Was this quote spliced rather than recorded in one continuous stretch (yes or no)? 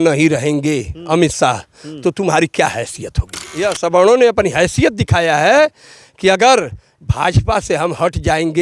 yes